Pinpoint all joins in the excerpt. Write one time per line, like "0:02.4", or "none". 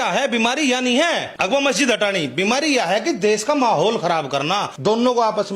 0:01.3
0:04.7